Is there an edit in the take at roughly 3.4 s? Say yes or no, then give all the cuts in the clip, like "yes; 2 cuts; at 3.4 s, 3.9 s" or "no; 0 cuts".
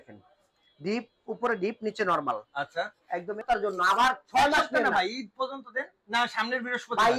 yes; 1 cut; at 3.4 s